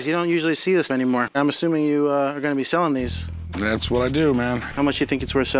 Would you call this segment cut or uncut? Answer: cut